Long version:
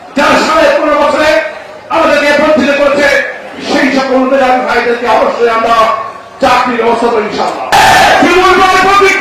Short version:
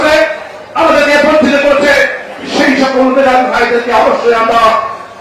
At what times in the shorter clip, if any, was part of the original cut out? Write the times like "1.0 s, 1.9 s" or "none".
none